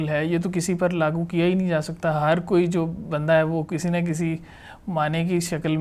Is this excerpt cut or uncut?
uncut